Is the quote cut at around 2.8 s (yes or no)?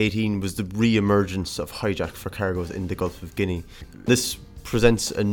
no